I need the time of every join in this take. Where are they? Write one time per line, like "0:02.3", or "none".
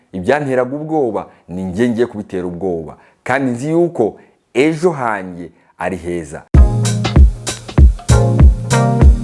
0:06.6